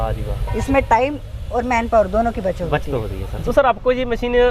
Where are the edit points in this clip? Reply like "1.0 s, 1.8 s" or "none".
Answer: 3.2 s